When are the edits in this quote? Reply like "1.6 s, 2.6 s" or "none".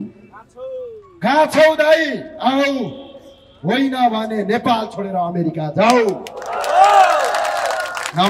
none